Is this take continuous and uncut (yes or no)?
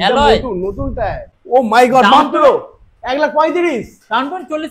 no